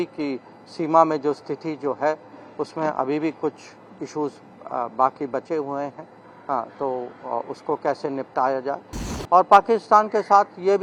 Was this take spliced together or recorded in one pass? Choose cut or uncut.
uncut